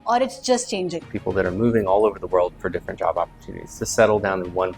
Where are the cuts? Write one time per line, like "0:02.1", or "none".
0:01.0